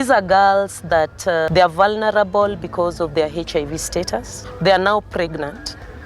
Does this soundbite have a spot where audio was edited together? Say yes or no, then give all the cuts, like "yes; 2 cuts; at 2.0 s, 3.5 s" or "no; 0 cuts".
yes; 2 cuts; at 1.5 s, 4.4 s